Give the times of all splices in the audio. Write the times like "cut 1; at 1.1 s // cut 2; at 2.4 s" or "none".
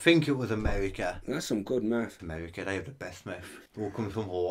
cut 1; at 2.2 s // cut 2; at 3.6 s